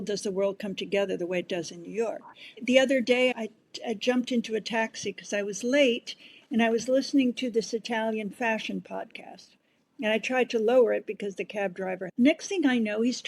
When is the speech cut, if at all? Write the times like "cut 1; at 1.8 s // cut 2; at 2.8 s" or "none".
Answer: cut 1; at 2.6 s // cut 2; at 3.3 s // cut 3; at 12.0 s